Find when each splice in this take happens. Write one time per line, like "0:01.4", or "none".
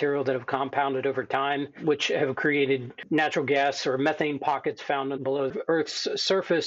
none

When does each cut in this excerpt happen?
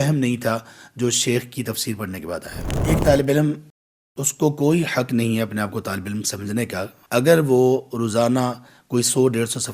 0:02.8
0:07.0

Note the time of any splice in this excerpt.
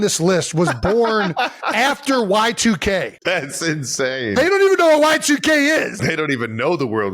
0:03.2
0:06.0

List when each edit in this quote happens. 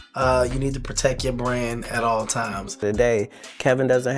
0:02.6

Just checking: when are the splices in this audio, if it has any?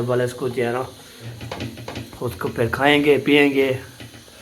0:01.4

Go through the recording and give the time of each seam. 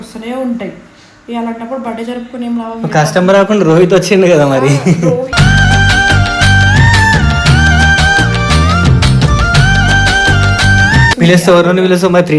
0:11.1

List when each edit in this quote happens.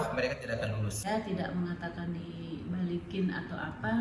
0:00.9

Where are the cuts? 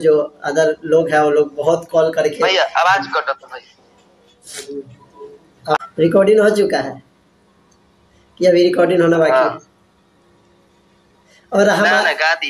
0:05.8

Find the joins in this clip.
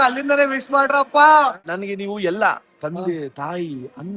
0:01.6

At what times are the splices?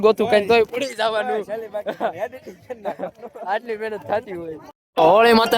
0:04.6

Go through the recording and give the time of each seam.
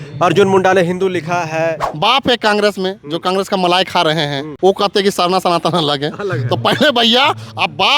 0:01.9
0:04.4

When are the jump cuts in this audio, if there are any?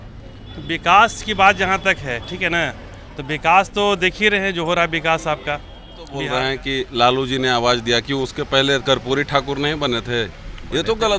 0:06.2

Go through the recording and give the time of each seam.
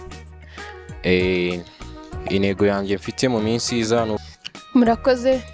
0:04.2

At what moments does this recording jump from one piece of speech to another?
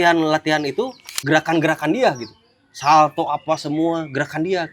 none

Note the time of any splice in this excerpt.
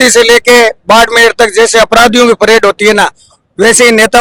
none

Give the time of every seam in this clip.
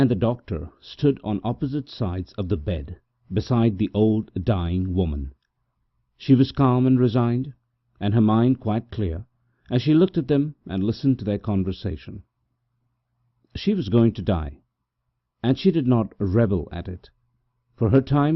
0:16.1

